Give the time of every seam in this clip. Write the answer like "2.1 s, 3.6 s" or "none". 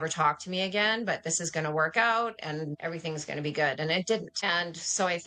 2.8 s, 4.3 s